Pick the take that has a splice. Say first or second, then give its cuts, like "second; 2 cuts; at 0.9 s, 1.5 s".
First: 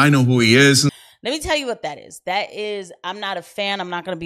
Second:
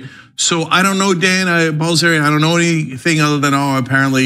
first; 1 cut; at 0.9 s